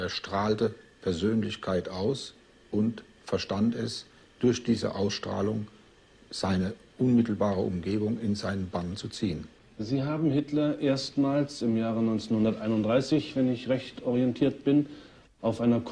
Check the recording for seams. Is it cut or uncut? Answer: uncut